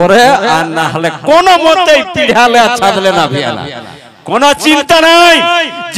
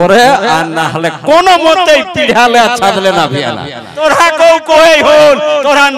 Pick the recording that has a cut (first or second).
second